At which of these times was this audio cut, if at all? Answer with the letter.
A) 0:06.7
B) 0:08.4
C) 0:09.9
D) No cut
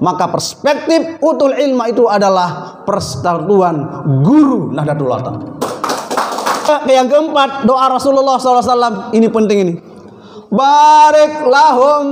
A